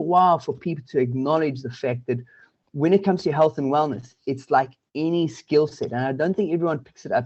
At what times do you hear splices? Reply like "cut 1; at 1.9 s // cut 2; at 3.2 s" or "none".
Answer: none